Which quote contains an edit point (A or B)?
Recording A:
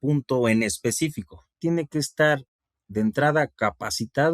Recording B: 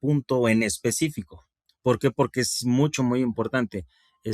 A